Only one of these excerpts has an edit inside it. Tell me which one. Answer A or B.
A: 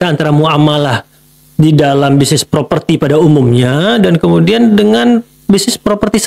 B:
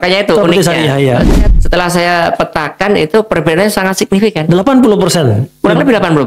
B